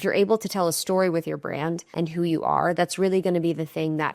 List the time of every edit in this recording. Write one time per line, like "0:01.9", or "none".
0:01.9

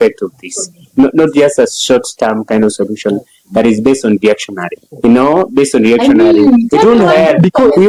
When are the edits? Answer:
none

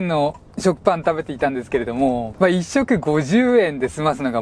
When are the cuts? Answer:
0:02.3

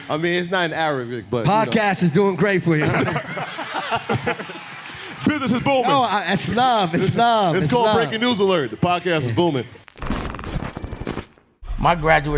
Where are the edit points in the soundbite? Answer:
0:09.8

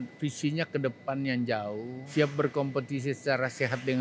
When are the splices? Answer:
0:02.0

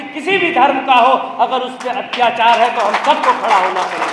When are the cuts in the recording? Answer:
none

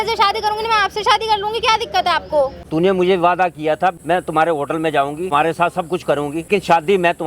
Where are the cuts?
0:02.6
0:04.0
0:05.3
0:06.5

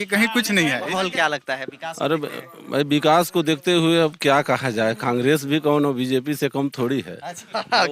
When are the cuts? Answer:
0:01.0

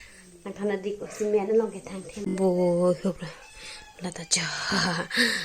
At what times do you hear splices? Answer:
0:02.3

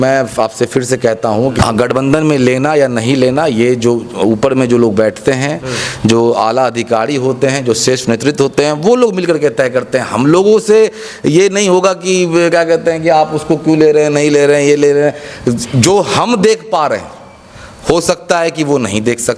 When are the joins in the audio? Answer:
none

